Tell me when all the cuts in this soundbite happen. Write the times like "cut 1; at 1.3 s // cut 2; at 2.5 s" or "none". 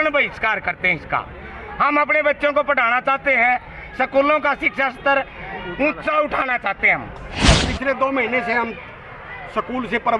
cut 1; at 7.5 s